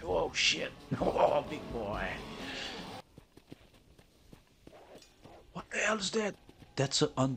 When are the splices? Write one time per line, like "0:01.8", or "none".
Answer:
0:03.0